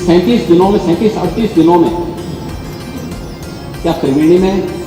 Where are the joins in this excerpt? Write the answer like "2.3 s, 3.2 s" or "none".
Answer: none